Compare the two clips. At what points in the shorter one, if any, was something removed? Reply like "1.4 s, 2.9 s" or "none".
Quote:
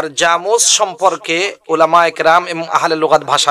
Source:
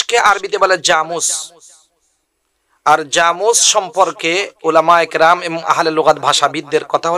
none